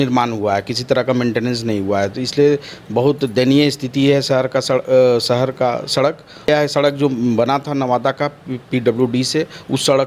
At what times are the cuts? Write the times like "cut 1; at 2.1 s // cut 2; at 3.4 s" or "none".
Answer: cut 1; at 6.5 s